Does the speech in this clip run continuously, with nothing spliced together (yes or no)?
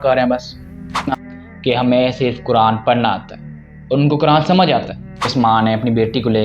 no